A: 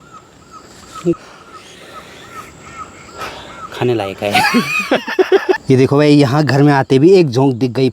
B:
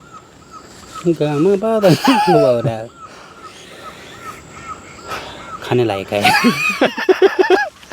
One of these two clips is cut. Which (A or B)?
A